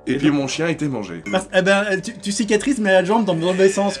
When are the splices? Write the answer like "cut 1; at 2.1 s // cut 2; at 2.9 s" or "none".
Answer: cut 1; at 1.1 s